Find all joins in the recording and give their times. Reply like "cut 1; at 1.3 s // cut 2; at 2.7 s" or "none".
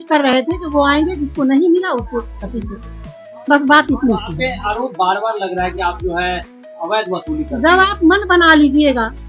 none